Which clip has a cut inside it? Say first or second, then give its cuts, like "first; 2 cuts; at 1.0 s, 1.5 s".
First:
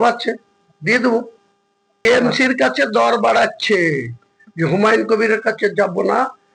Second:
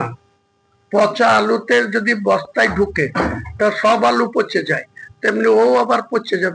first; 1 cut; at 2.0 s